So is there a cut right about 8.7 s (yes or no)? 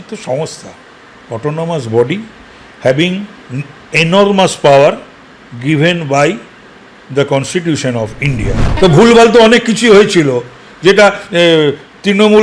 yes